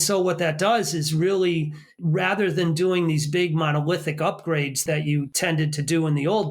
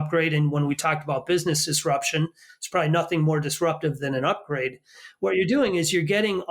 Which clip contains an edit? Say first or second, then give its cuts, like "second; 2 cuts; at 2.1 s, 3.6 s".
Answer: first; 2 cuts; at 1.9 s, 5.2 s